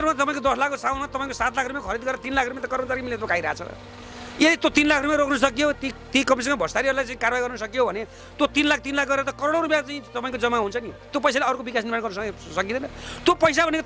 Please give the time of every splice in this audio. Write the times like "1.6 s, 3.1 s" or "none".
none